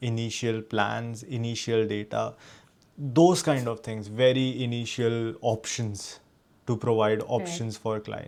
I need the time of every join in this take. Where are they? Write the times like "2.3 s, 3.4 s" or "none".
none